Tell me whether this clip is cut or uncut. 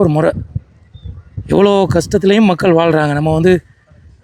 uncut